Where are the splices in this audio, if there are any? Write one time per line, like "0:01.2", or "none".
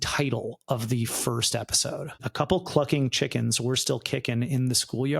0:02.2